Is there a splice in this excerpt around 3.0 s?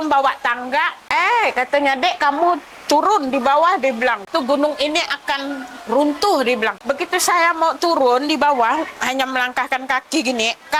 no; 3 cuts; at 1.0 s, 4.3 s, 6.8 s

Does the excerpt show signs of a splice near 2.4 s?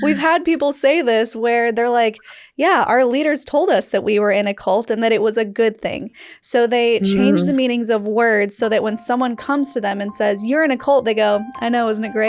no; 0 cuts

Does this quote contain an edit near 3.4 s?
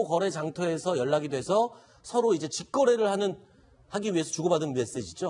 no; 1 cut; at 1.7 s

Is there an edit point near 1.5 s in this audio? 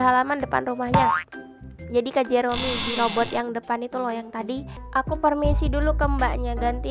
no; 1 cut; at 4.7 s

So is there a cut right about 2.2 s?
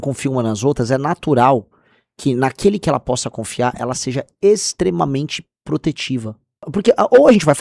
no; 1 cut; at 6.7 s

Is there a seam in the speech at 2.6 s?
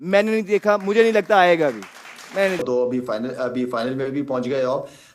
yes; 1 cut; at 2.6 s

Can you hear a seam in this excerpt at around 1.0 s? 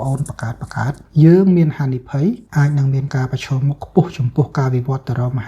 yes; 2 cuts; at 1.0 s, 2.4 s

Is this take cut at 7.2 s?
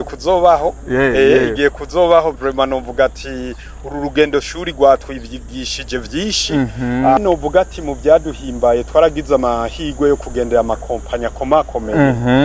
yes; 1 cut; at 7.2 s

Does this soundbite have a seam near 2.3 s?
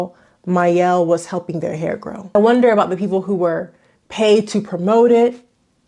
yes; 1 cut; at 2.3 s

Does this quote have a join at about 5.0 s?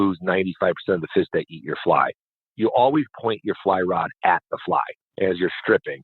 yes; 2 cuts; at 2.5 s, 5.0 s

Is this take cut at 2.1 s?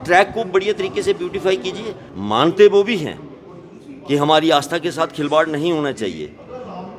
yes; 1 cut; at 2.1 s

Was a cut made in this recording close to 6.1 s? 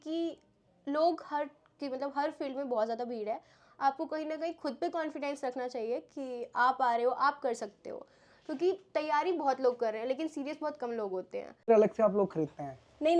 no; 1 cut; at 11.6 s

